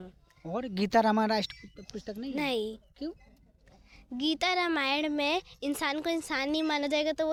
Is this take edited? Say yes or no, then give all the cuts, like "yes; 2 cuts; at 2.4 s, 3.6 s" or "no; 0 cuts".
no; 0 cuts